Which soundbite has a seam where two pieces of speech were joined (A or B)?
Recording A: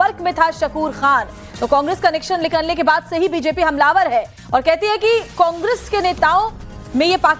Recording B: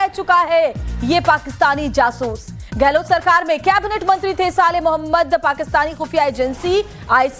A